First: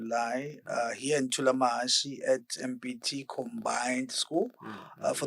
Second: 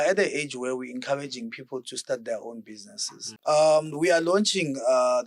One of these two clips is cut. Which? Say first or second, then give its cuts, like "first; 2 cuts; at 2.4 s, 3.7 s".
second; 1 cut; at 3.2 s